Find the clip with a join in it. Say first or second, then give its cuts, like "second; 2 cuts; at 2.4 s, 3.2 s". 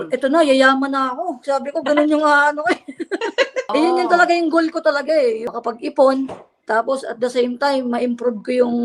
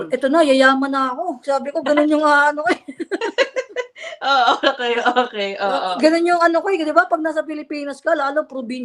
first; 2 cuts; at 3.7 s, 5.5 s